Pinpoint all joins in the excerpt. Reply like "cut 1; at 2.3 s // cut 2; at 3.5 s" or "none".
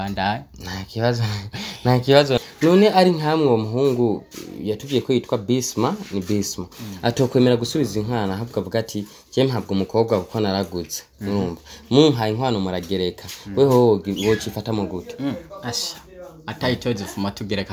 cut 1; at 2.4 s